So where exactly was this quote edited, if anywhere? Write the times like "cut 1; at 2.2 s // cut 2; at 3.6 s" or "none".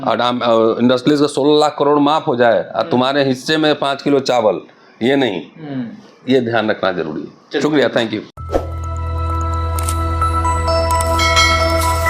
none

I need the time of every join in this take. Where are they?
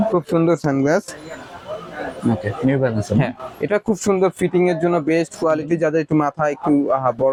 none

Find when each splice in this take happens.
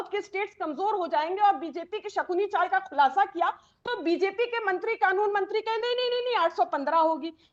none

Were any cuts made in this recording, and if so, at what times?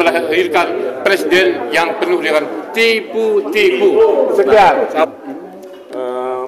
none

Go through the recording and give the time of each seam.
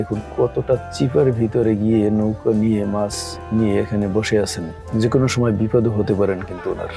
none

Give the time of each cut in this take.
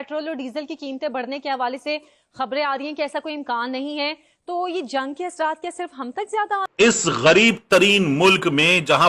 cut 1; at 6.7 s

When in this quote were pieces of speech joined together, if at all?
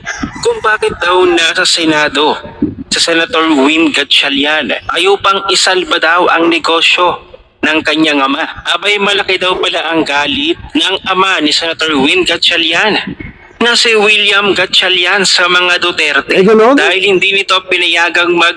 none

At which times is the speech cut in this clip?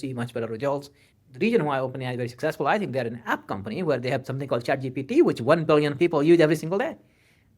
cut 1; at 1.0 s

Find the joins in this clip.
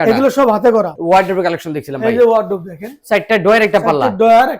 cut 1; at 0.9 s

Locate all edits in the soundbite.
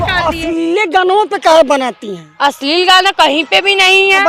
none

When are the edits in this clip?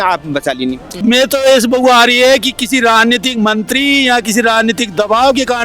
cut 1; at 1.0 s

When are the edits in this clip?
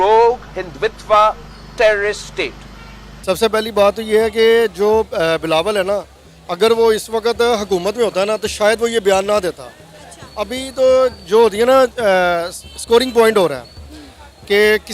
cut 1; at 3.1 s

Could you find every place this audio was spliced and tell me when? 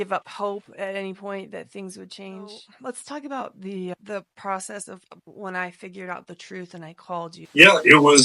cut 1; at 2.7 s // cut 2; at 7.4 s

